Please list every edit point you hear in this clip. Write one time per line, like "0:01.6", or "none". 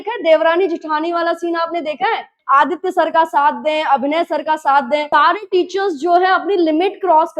0:02.3
0:05.1

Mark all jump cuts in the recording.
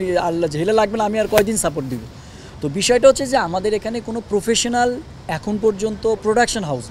none

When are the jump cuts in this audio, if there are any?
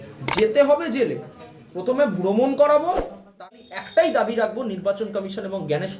0:03.4

